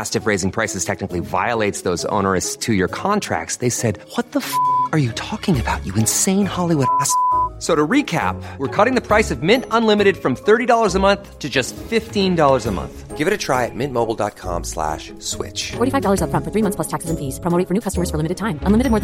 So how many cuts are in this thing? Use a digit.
0